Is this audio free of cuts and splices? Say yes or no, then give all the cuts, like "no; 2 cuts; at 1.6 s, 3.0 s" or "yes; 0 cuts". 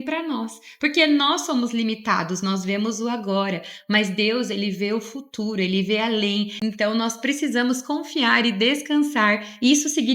no; 1 cut; at 6.5 s